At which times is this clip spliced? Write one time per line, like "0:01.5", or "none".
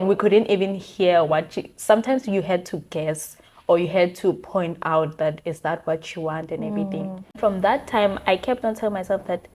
0:07.4